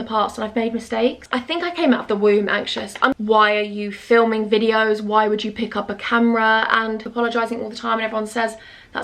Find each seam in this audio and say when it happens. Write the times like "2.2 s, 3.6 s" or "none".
1.2 s, 3.1 s, 7.0 s